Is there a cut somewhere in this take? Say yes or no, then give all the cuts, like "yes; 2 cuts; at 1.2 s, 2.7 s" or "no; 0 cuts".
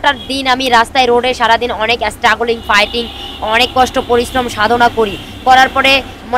no; 0 cuts